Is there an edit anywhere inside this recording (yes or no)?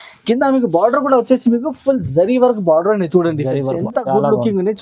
yes